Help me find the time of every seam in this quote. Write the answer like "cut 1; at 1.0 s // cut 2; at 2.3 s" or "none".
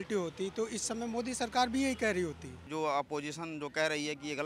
cut 1; at 2.7 s